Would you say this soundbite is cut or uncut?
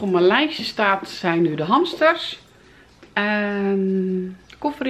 uncut